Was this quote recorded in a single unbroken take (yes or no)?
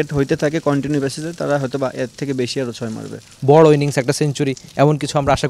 no